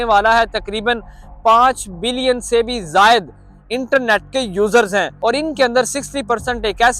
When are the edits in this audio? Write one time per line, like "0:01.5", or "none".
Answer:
0:05.1